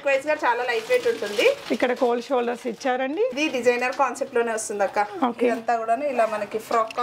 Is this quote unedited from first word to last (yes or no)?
no